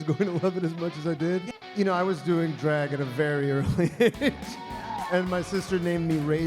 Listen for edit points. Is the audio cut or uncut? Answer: cut